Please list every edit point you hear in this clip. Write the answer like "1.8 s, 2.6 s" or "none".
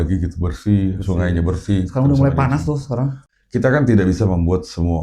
3.2 s